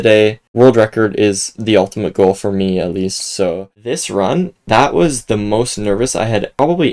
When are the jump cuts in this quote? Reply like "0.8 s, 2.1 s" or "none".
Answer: 3.9 s

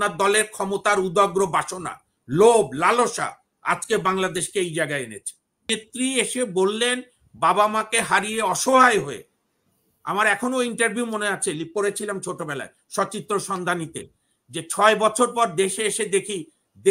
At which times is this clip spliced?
5.7 s

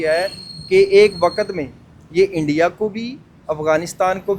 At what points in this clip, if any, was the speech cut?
none

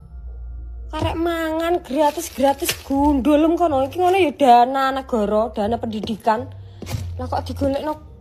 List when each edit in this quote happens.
none

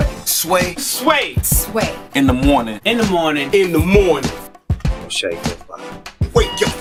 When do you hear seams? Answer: none

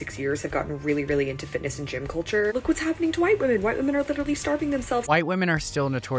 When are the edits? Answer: 2.5 s, 5.0 s

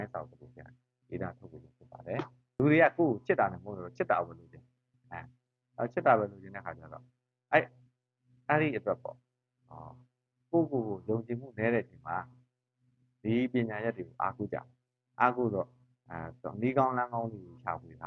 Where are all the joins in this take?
2.6 s

